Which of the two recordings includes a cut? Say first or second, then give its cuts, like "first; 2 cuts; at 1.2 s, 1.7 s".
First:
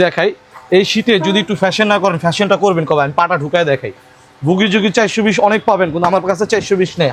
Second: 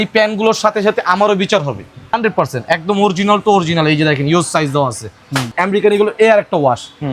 second; 2 cuts; at 2.2 s, 5.5 s